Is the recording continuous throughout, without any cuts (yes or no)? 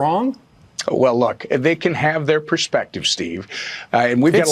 yes